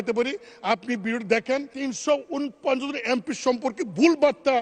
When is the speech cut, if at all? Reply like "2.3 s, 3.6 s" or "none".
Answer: 1.7 s